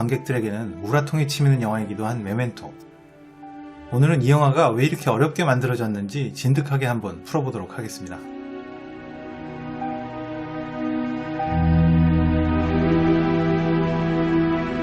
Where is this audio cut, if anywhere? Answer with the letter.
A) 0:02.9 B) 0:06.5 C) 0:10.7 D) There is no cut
B